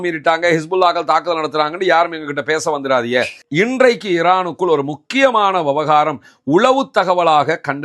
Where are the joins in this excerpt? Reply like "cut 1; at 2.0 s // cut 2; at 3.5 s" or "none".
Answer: cut 1; at 3.4 s